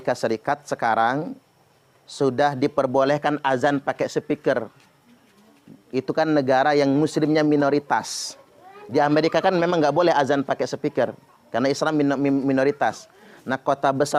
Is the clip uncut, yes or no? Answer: yes